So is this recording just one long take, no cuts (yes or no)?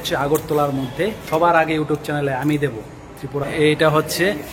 no